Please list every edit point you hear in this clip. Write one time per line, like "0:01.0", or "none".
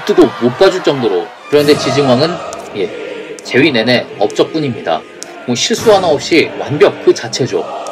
0:01.3